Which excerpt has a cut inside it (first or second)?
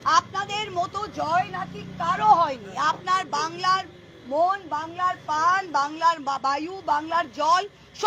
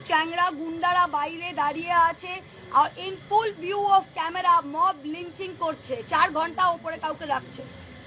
second